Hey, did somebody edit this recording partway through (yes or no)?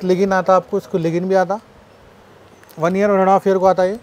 no